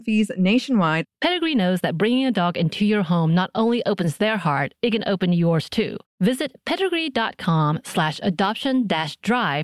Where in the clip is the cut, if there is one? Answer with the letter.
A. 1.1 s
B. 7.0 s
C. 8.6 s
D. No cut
A